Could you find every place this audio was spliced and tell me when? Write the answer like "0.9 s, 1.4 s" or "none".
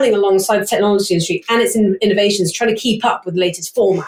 none